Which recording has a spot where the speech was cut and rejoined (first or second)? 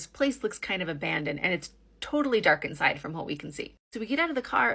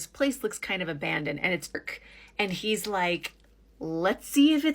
second